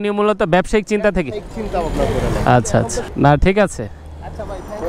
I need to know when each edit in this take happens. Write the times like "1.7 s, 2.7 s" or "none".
none